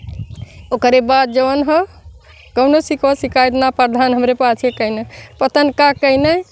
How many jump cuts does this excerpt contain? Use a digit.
0